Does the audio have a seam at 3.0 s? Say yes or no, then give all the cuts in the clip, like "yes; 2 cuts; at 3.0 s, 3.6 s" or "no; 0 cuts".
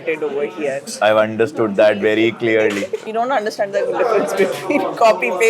yes; 2 cuts; at 0.9 s, 3.0 s